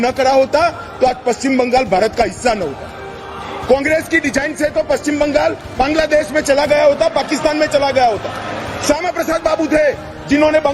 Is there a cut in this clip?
no; 0 cuts

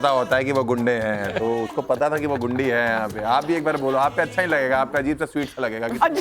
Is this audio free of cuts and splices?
yes; 0 cuts

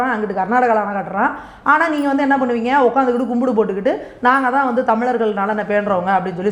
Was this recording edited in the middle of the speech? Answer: no; 0 cuts

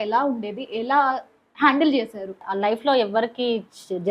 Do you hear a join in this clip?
yes; 1 cut; at 2.4 s

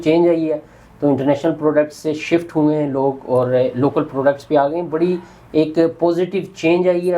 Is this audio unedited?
yes; 0 cuts

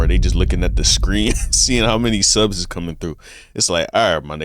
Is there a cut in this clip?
no; 0 cuts

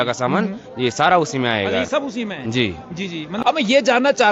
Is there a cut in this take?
yes; 1 cut; at 3.2 s

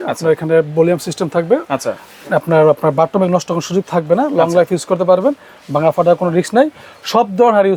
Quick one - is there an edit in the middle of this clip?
no; 0 cuts

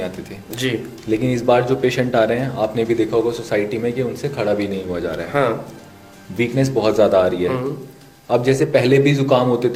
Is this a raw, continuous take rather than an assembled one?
yes; 0 cuts

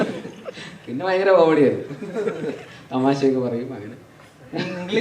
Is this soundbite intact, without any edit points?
yes; 0 cuts

